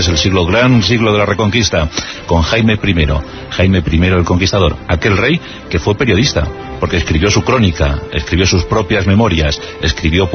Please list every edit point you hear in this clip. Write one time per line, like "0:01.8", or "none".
0:09.3